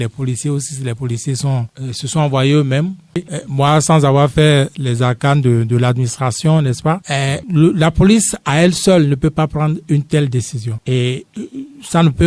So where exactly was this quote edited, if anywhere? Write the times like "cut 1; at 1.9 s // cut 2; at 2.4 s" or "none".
cut 1; at 3.2 s